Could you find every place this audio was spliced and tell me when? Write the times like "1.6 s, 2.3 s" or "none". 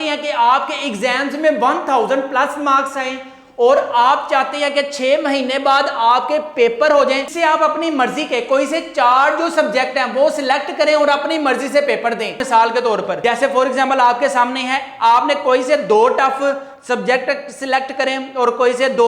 12.4 s, 13.1 s